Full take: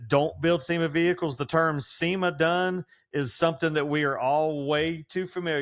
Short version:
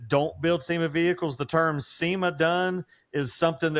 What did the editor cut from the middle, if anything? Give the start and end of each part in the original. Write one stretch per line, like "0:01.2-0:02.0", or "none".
none